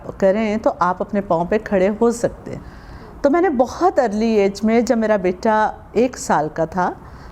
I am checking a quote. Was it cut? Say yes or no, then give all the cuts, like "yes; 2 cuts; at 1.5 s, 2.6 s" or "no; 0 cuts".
no; 0 cuts